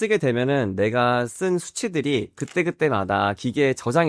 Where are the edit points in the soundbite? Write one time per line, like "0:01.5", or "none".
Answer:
none